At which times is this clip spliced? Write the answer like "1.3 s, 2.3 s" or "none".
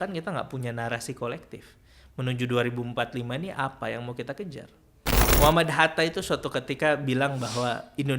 5.3 s